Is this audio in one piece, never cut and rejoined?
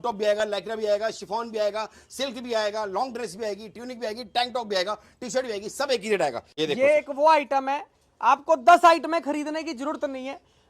no; 1 cut; at 6.5 s

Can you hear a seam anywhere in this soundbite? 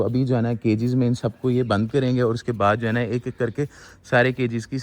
no; 0 cuts

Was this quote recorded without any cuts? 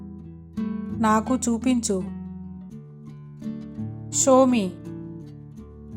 no; 4 cuts; at 1.0 s, 2.0 s, 4.2 s, 4.8 s

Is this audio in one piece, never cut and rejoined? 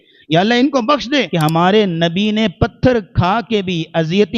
no; 1 cut; at 1.3 s

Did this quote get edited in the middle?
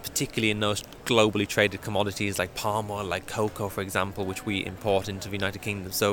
no; 0 cuts

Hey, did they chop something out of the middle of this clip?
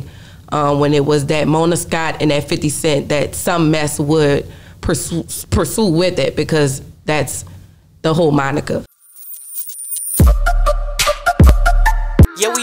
yes; 1 cut; at 8.9 s

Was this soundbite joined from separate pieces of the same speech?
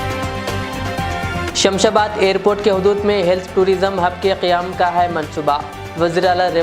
yes; 1 cut; at 1.5 s

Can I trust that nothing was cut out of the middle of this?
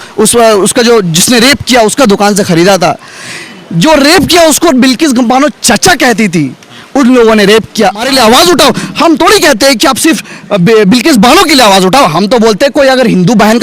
no; 1 cut; at 8.0 s

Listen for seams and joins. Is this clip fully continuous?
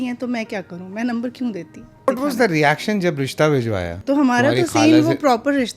no; 2 cuts; at 2.1 s, 3.9 s

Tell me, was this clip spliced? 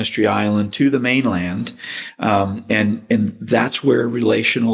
no; 0 cuts

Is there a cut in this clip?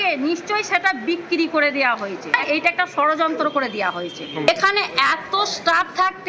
yes; 1 cut; at 2.4 s

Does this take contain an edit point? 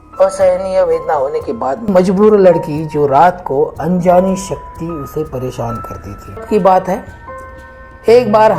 yes; 2 cuts; at 1.9 s, 6.4 s

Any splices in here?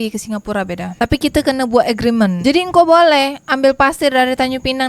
yes; 1 cut; at 2.4 s

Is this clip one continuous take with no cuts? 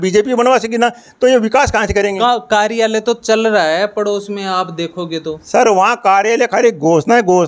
yes; 0 cuts

